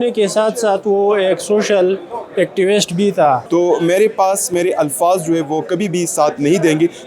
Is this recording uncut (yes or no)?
no